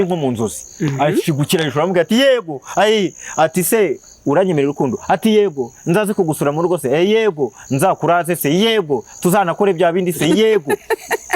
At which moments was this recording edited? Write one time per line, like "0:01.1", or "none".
none

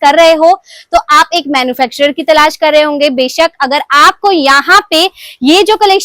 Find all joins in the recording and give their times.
none

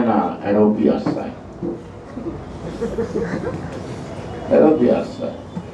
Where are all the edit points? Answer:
none

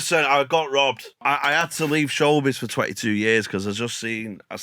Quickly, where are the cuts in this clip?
0:01.1

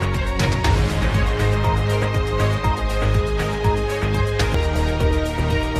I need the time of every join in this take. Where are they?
none

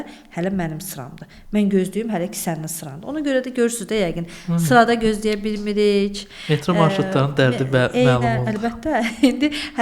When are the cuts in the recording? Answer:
none

